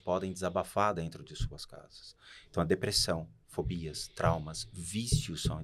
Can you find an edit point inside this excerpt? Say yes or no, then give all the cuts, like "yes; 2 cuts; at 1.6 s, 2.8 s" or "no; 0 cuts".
no; 0 cuts